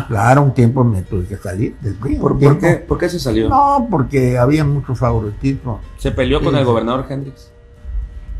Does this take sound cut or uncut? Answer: uncut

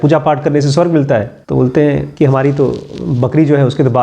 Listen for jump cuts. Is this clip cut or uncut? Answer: cut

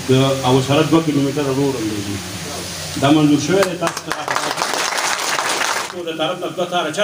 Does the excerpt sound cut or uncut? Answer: cut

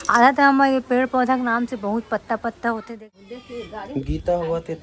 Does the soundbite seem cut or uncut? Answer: cut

